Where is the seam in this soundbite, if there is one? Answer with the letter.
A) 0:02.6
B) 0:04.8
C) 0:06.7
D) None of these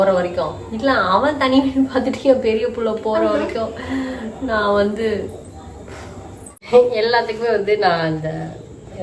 C